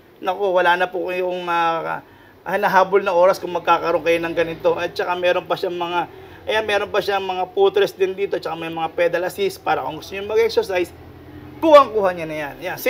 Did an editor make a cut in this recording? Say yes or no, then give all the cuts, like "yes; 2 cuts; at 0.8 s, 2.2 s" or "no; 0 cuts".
no; 0 cuts